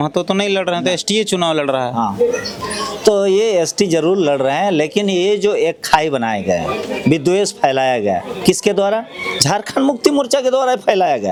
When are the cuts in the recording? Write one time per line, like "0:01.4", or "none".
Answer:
none